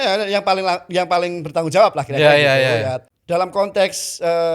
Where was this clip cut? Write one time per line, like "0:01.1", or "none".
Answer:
0:03.1